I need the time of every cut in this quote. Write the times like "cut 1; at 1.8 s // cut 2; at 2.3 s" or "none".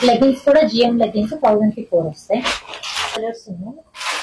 cut 1; at 3.2 s